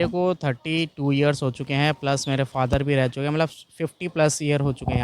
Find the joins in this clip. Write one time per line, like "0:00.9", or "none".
none